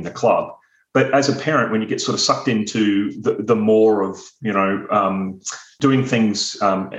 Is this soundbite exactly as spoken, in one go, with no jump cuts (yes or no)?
no